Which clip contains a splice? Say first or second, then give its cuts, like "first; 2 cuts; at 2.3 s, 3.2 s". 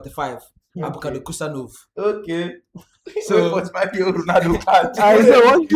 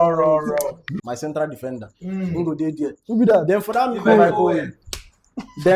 second; 1 cut; at 0.9 s